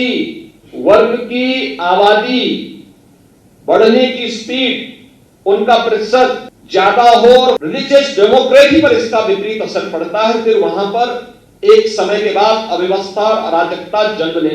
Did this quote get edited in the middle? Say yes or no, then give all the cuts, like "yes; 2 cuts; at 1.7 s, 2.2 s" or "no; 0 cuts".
yes; 2 cuts; at 6.5 s, 7.7 s